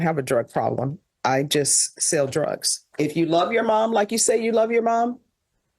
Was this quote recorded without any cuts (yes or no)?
no